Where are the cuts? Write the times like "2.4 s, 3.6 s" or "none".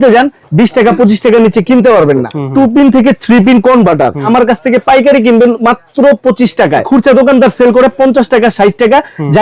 2.4 s, 4.2 s, 6.9 s